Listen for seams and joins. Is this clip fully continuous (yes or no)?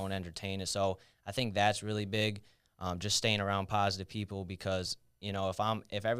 yes